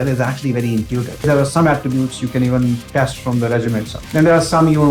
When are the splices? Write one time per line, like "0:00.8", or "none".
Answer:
0:01.2
0:04.0